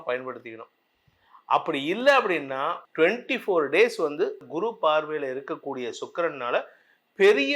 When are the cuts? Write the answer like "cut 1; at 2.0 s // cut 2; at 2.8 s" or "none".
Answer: cut 1; at 2.8 s // cut 2; at 4.4 s